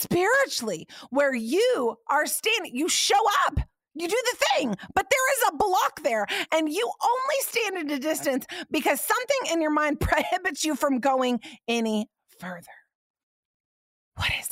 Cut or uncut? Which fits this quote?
uncut